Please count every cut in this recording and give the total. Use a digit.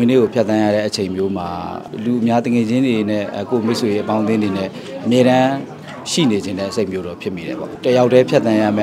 2